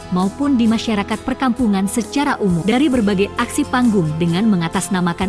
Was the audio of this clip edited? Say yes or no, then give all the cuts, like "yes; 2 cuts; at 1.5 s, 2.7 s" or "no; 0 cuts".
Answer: yes; 1 cut; at 2.6 s